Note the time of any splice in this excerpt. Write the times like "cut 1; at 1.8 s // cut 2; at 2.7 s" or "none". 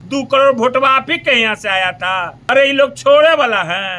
none